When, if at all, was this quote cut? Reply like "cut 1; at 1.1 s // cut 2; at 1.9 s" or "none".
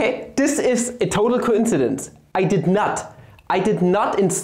none